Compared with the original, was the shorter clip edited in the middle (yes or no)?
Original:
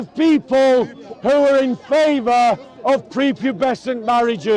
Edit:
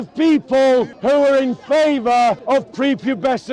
yes